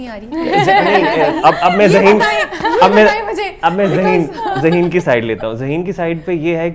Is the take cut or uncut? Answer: uncut